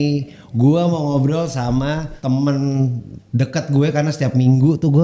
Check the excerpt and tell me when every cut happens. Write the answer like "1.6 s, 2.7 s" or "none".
2.1 s